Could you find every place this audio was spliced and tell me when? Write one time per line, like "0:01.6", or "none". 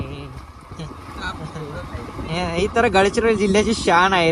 none